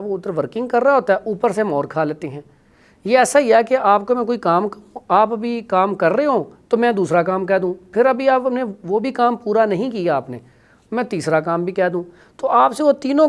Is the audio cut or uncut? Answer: uncut